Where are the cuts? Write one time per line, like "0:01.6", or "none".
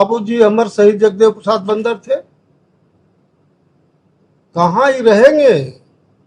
none